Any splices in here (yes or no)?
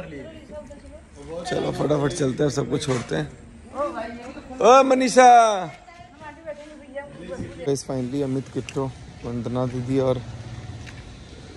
yes